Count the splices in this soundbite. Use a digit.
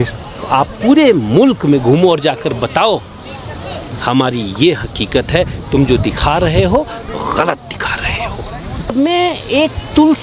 1